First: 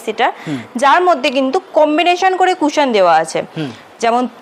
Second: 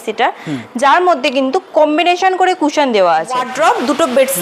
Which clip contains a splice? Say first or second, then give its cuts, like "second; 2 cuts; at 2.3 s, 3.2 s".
second; 1 cut; at 3.5 s